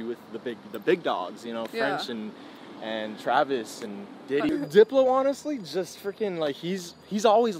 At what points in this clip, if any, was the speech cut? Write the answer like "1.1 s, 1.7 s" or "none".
4.5 s